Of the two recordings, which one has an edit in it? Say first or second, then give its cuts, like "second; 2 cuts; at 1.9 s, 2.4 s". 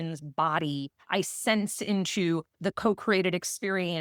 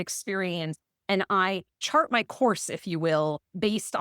second; 1 cut; at 1.7 s